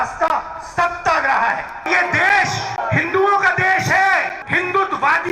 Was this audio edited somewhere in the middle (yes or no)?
yes